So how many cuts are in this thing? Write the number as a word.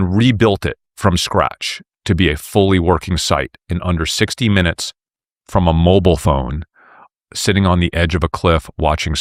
zero